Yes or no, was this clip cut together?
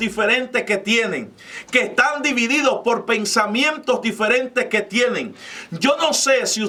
no